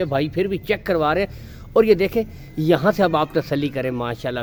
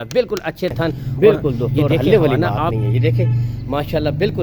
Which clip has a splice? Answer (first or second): second